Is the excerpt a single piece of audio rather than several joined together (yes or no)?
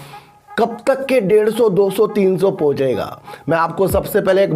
yes